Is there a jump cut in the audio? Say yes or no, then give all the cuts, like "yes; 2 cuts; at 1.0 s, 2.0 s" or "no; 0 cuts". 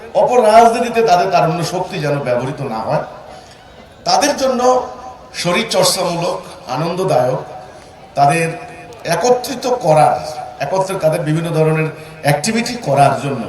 no; 0 cuts